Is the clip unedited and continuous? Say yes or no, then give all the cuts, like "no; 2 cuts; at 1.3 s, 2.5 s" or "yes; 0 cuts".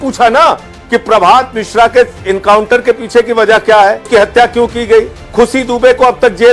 no; 2 cuts; at 4.1 s, 5.2 s